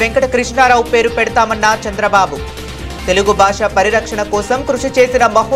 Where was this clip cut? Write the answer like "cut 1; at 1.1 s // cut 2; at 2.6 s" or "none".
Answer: none